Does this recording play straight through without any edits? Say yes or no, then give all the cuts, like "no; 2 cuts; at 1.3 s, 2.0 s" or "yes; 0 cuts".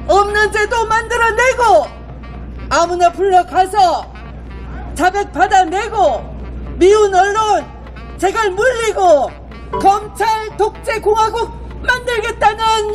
yes; 0 cuts